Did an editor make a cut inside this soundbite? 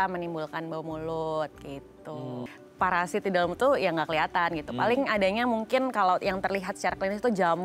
yes; 1 cut; at 2.5 s

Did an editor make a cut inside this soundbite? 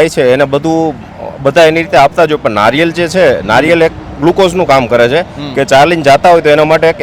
no; 0 cuts

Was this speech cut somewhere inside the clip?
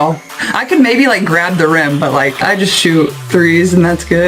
yes; 1 cut; at 2.4 s

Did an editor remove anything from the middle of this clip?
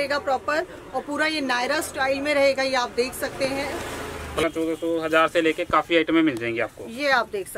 yes; 1 cut; at 4.4 s

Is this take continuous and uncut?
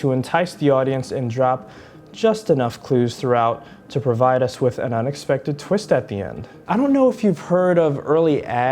no; 1 cut; at 6.6 s

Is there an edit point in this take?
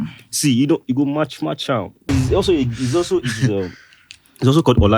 yes; 1 cut; at 2.1 s

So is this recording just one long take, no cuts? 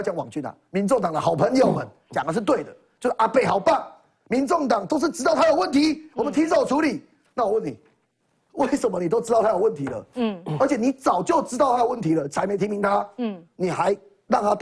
yes; 0 cuts

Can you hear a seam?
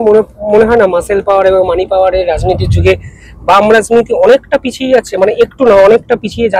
no; 0 cuts

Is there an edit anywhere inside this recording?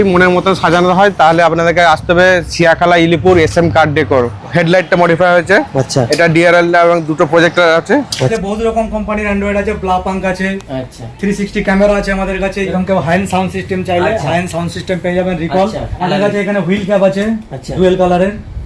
yes; 4 cuts; at 4.3 s, 8.3 s, 12.7 s, 15.9 s

